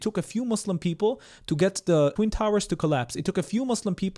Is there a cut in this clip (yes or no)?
yes